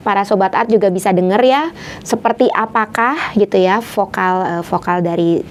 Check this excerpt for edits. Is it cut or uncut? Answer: uncut